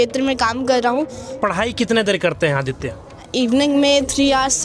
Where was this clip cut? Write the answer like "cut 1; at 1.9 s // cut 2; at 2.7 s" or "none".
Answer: cut 1; at 1.3 s // cut 2; at 3.2 s